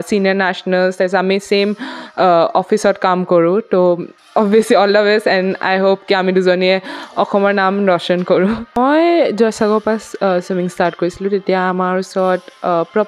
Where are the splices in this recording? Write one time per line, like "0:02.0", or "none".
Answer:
0:08.8